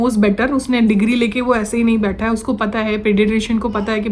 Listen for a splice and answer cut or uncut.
uncut